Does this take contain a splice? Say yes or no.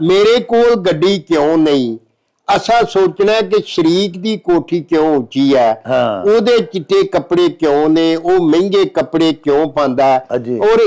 no